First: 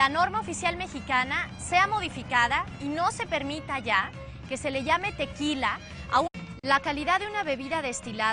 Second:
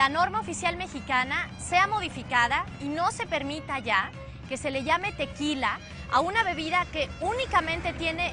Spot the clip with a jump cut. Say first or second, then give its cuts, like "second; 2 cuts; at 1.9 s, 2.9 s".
second; 1 cut; at 6.3 s